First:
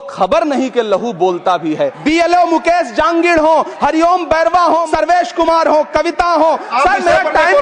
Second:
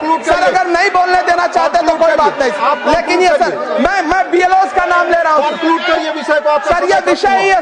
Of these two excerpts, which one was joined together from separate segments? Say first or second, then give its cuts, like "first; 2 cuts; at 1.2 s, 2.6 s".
first; 3 cuts; at 2.0 s, 4.9 s, 6.7 s